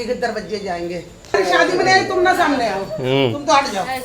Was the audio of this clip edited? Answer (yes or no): yes